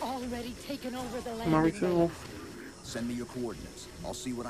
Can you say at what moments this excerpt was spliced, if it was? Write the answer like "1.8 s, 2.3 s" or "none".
none